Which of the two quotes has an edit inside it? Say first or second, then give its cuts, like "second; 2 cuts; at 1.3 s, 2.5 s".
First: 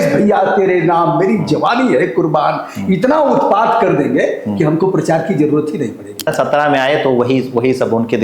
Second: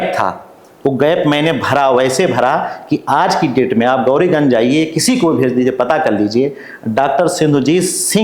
first; 1 cut; at 6.3 s